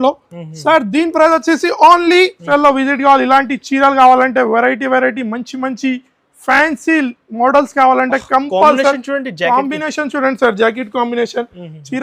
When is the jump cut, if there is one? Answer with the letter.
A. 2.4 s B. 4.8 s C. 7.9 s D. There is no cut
A